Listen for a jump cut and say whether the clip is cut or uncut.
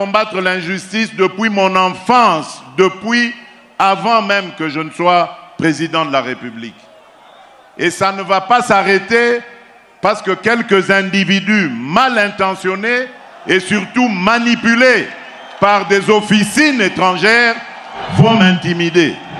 uncut